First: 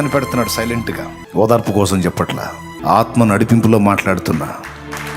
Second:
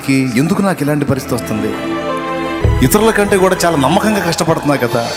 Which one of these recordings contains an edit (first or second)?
first